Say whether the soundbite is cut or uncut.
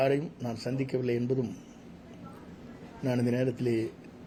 uncut